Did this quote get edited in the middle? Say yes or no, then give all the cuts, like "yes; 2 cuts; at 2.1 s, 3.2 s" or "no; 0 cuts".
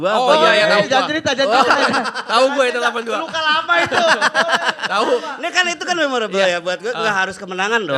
no; 0 cuts